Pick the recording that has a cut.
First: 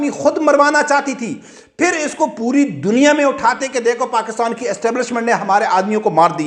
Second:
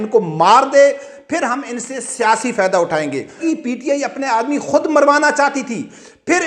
second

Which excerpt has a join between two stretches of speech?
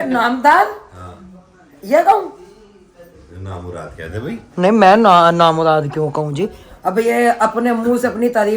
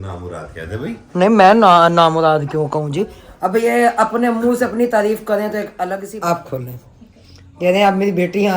second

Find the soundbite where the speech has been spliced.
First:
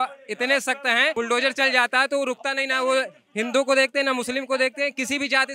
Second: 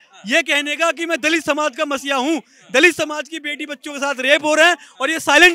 first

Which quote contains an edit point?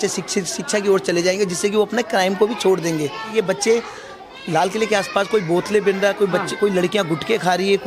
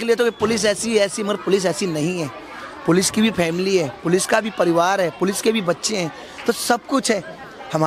first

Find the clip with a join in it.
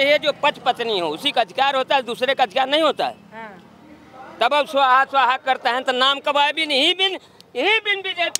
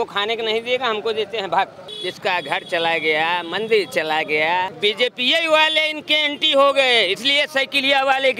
second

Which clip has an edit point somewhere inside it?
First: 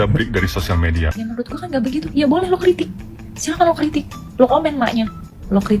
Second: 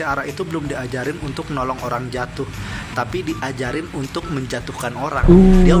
first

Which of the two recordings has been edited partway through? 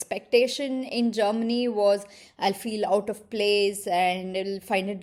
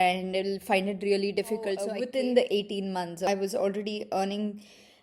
second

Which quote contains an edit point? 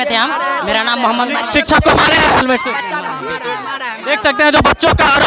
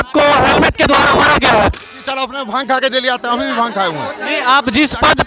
second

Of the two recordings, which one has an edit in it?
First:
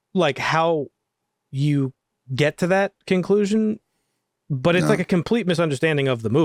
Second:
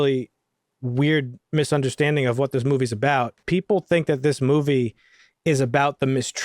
second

